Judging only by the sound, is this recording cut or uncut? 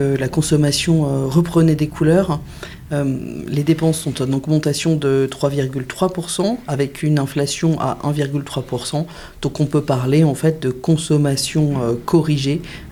uncut